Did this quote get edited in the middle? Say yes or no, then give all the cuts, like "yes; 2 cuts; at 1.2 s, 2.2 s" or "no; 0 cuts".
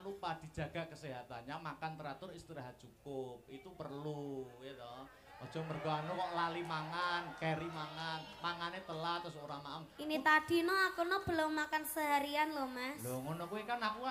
no; 0 cuts